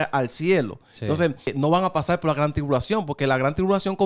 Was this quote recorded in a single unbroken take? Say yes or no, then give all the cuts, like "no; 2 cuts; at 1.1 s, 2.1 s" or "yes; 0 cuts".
no; 1 cut; at 1.5 s